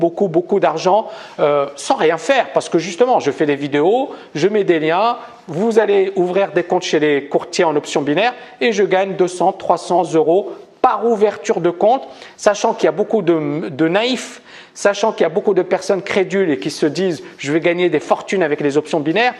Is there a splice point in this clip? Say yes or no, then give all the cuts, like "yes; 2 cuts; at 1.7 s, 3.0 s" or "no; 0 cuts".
yes; 1 cut; at 2.5 s